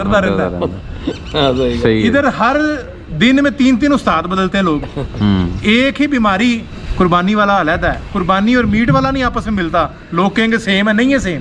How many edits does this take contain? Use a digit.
1